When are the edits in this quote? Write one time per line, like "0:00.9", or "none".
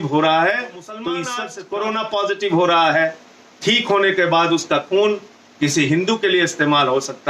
0:01.4

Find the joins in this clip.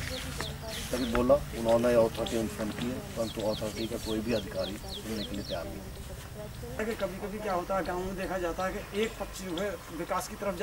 0:06.8

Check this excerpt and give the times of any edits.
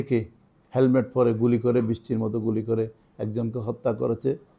none

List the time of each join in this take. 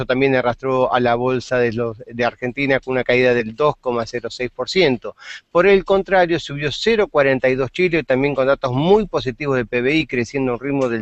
none

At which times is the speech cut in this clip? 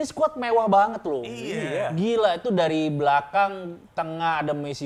none

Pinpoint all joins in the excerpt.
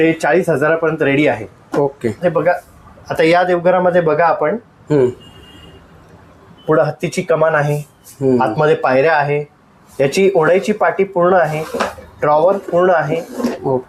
none

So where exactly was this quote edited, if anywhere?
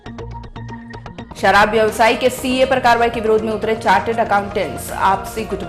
0:01.2

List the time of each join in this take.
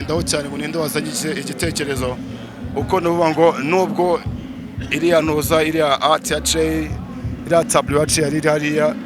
none

